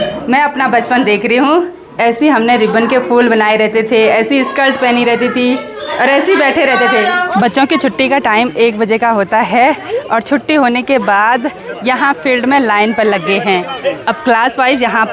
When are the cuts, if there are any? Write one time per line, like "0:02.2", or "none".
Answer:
none